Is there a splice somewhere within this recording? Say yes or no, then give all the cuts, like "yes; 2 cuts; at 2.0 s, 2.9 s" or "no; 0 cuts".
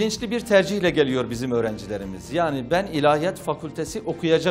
no; 0 cuts